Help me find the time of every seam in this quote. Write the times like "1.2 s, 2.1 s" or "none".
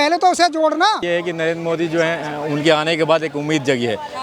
1.0 s